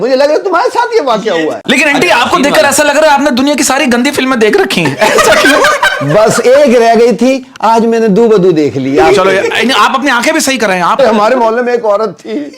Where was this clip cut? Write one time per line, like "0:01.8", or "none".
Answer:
0:01.6
0:11.0